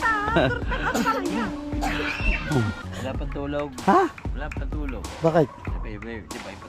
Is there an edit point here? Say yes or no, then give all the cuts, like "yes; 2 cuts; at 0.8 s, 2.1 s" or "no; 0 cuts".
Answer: yes; 1 cut; at 2.9 s